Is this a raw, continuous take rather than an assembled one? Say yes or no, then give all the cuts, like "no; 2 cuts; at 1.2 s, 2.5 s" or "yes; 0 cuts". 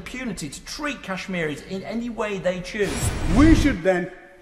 no; 1 cut; at 3.1 s